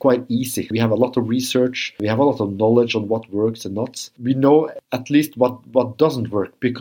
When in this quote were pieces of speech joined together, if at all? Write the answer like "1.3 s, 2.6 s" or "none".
none